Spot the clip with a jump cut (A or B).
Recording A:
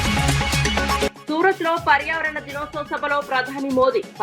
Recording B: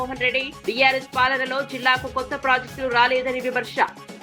A